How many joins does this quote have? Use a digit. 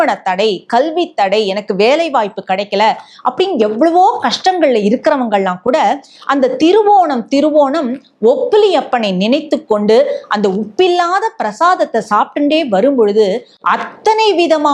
0